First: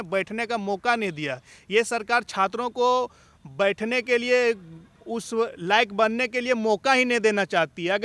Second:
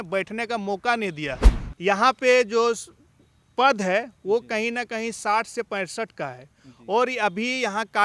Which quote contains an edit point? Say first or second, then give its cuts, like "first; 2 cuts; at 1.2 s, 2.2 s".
second; 1 cut; at 1.5 s